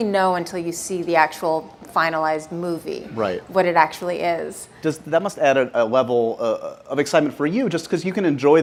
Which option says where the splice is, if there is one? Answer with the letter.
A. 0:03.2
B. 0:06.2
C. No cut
C